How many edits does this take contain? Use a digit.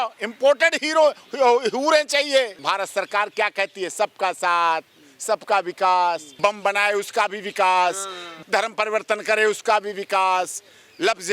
3